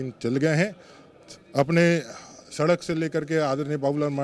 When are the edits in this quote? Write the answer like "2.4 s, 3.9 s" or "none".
none